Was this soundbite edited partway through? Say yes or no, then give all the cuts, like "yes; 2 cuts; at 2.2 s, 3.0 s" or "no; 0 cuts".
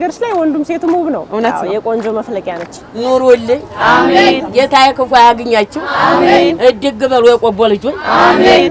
yes; 2 cuts; at 1.3 s, 2.8 s